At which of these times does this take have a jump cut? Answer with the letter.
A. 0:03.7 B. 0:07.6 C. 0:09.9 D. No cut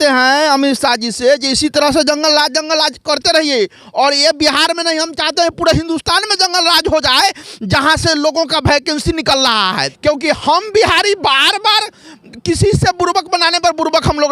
C